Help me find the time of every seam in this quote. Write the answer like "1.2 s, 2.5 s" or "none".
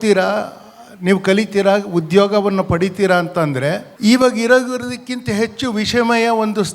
3.9 s